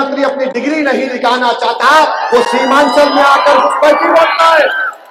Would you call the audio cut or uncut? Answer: uncut